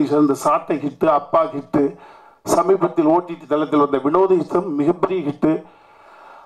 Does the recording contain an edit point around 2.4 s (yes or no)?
no